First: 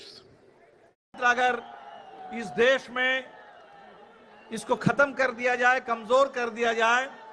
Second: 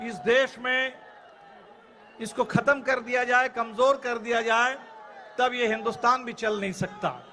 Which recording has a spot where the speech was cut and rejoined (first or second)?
first